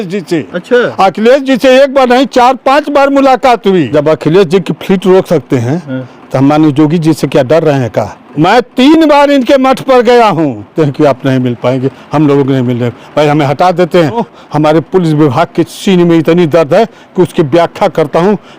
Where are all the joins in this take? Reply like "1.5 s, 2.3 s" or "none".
3.9 s, 8.2 s, 10.7 s, 14.2 s